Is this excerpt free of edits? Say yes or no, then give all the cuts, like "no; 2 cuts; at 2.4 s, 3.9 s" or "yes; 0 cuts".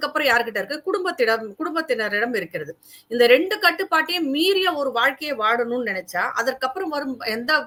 yes; 0 cuts